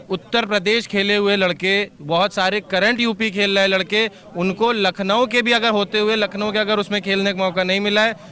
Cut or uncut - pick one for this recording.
uncut